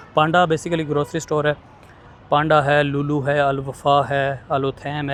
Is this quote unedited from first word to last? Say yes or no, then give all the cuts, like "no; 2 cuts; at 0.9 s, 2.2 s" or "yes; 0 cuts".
yes; 0 cuts